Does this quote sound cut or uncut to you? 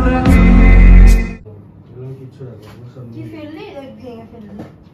uncut